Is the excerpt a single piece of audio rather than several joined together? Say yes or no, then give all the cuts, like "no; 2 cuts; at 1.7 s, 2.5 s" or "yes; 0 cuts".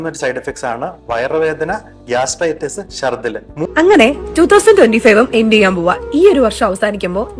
no; 1 cut; at 3.6 s